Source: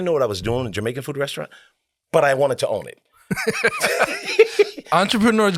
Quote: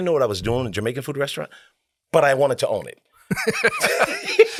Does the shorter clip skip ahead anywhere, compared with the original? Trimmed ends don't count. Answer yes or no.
no